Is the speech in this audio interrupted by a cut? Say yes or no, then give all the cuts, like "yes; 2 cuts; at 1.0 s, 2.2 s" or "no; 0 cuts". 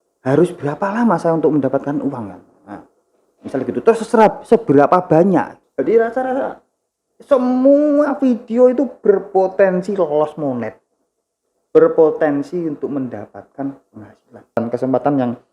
yes; 2 cuts; at 5.6 s, 14.6 s